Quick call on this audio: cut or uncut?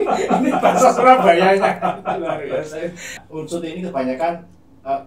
cut